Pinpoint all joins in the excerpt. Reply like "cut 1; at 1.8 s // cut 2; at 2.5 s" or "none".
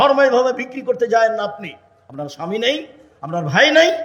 none